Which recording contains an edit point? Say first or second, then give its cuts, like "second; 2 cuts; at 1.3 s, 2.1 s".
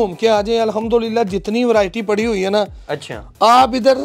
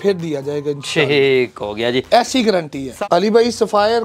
second; 1 cut; at 2.8 s